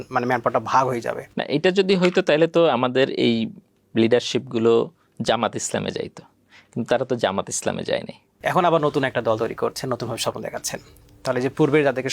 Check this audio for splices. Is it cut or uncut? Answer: cut